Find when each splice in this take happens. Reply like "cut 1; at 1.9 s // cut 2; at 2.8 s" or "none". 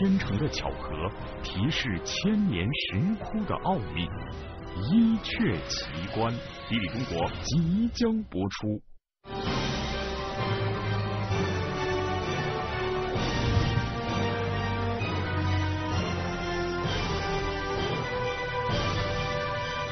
none